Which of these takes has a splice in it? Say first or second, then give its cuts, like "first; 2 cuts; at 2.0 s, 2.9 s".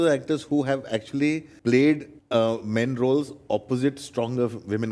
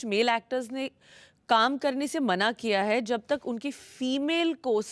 first; 2 cuts; at 1.5 s, 2.1 s